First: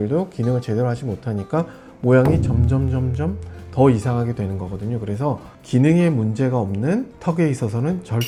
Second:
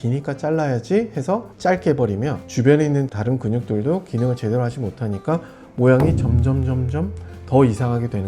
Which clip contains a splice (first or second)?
second